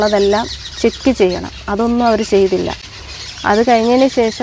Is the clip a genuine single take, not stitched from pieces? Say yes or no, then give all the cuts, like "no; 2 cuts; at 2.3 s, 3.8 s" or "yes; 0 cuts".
yes; 0 cuts